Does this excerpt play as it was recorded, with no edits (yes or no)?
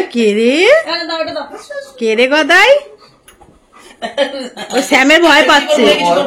yes